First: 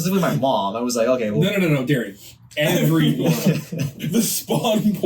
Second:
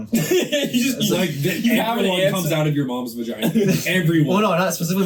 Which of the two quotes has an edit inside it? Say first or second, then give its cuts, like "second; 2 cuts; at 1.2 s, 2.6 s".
first; 1 cut; at 4.0 s